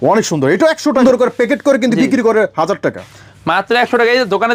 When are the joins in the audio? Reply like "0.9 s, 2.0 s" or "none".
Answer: 1.0 s